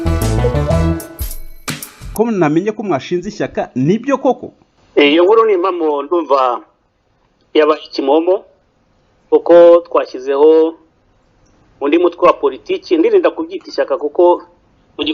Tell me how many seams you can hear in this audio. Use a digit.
1